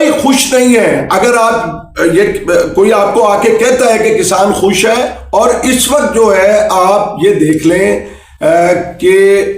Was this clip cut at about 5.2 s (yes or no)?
yes